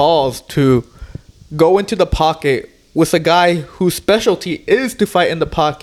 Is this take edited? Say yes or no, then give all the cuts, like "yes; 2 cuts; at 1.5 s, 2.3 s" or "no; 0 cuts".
no; 0 cuts